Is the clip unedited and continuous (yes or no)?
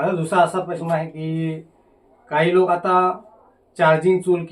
yes